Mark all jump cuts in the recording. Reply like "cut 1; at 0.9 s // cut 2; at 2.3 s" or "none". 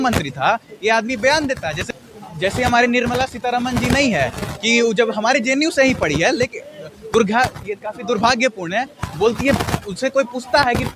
cut 1; at 1.8 s